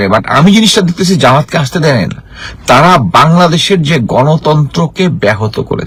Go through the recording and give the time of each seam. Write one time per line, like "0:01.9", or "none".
none